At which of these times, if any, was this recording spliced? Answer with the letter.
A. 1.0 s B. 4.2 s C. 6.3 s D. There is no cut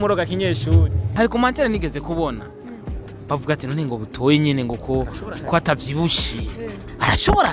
A